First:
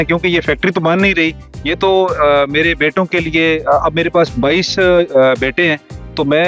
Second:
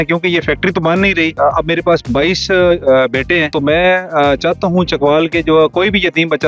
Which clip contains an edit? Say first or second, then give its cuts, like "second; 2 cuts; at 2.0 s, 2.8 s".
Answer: second; 2 cuts; at 1.3 s, 3.5 s